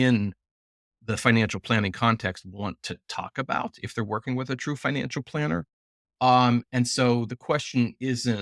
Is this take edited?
no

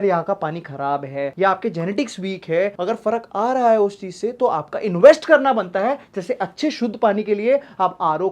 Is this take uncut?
yes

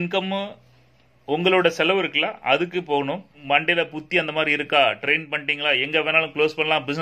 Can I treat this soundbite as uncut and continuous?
no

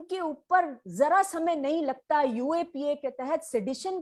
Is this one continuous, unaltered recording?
yes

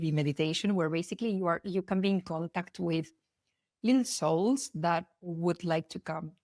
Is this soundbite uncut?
yes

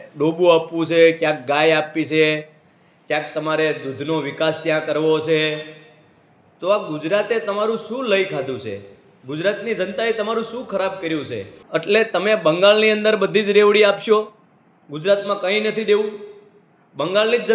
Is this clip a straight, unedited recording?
no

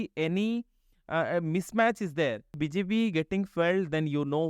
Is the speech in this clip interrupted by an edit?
yes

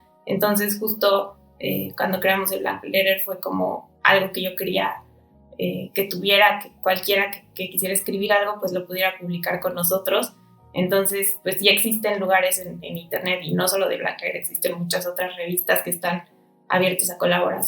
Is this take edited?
yes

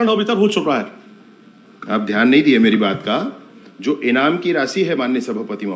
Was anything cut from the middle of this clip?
no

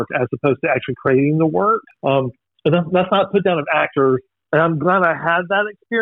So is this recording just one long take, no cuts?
no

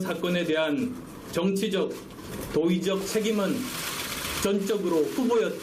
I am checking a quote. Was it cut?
yes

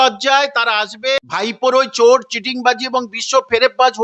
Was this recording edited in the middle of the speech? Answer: yes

